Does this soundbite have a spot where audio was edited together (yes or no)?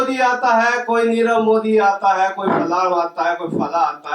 no